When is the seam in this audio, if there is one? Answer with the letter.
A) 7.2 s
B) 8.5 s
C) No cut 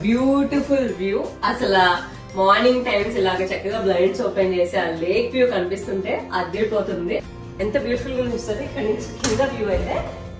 A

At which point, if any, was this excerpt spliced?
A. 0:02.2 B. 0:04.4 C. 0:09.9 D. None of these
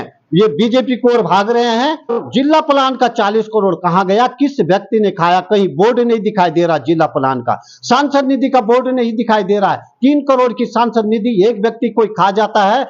A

